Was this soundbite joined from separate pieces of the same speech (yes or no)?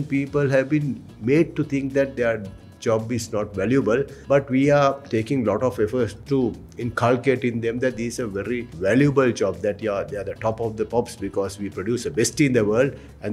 yes